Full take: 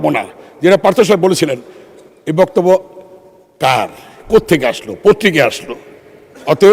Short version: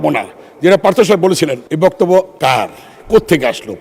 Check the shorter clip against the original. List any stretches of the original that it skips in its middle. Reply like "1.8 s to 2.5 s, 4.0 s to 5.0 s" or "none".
1.6 s to 2.2 s, 2.9 s to 3.5 s